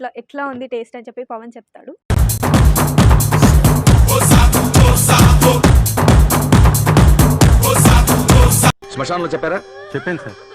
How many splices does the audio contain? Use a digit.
1